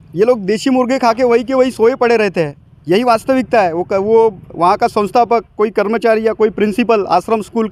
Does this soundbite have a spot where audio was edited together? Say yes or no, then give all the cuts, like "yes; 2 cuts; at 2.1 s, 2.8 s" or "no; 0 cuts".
no; 0 cuts